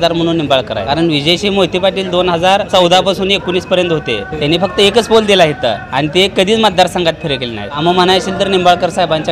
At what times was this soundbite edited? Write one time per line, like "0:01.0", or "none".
0:00.8
0:02.7
0:04.3
0:05.8
0:07.8